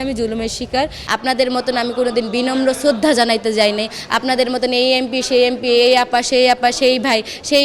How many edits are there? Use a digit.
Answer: 1